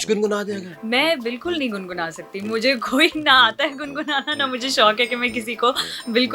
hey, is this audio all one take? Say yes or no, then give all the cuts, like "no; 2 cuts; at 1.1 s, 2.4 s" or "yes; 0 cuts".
yes; 0 cuts